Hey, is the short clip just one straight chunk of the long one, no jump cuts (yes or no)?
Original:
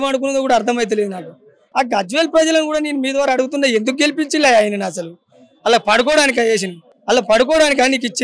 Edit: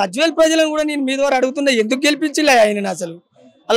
yes